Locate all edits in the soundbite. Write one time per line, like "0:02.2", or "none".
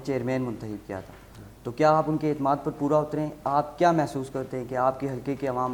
none